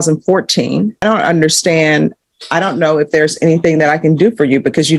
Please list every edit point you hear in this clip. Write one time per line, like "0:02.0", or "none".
0:01.0